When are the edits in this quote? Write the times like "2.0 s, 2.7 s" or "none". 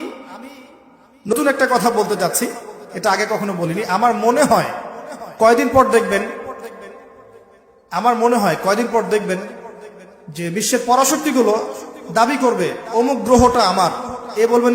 1.3 s